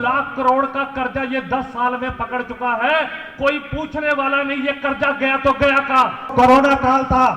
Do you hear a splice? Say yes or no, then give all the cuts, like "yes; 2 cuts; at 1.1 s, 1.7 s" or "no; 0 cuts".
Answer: yes; 1 cut; at 6.3 s